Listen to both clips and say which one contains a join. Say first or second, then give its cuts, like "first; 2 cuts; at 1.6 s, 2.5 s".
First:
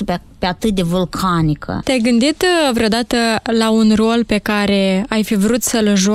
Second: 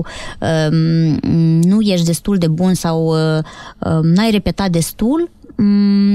first; 1 cut; at 1.7 s